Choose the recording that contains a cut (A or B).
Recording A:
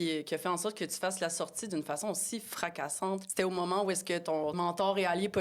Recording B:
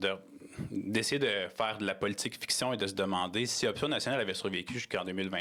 A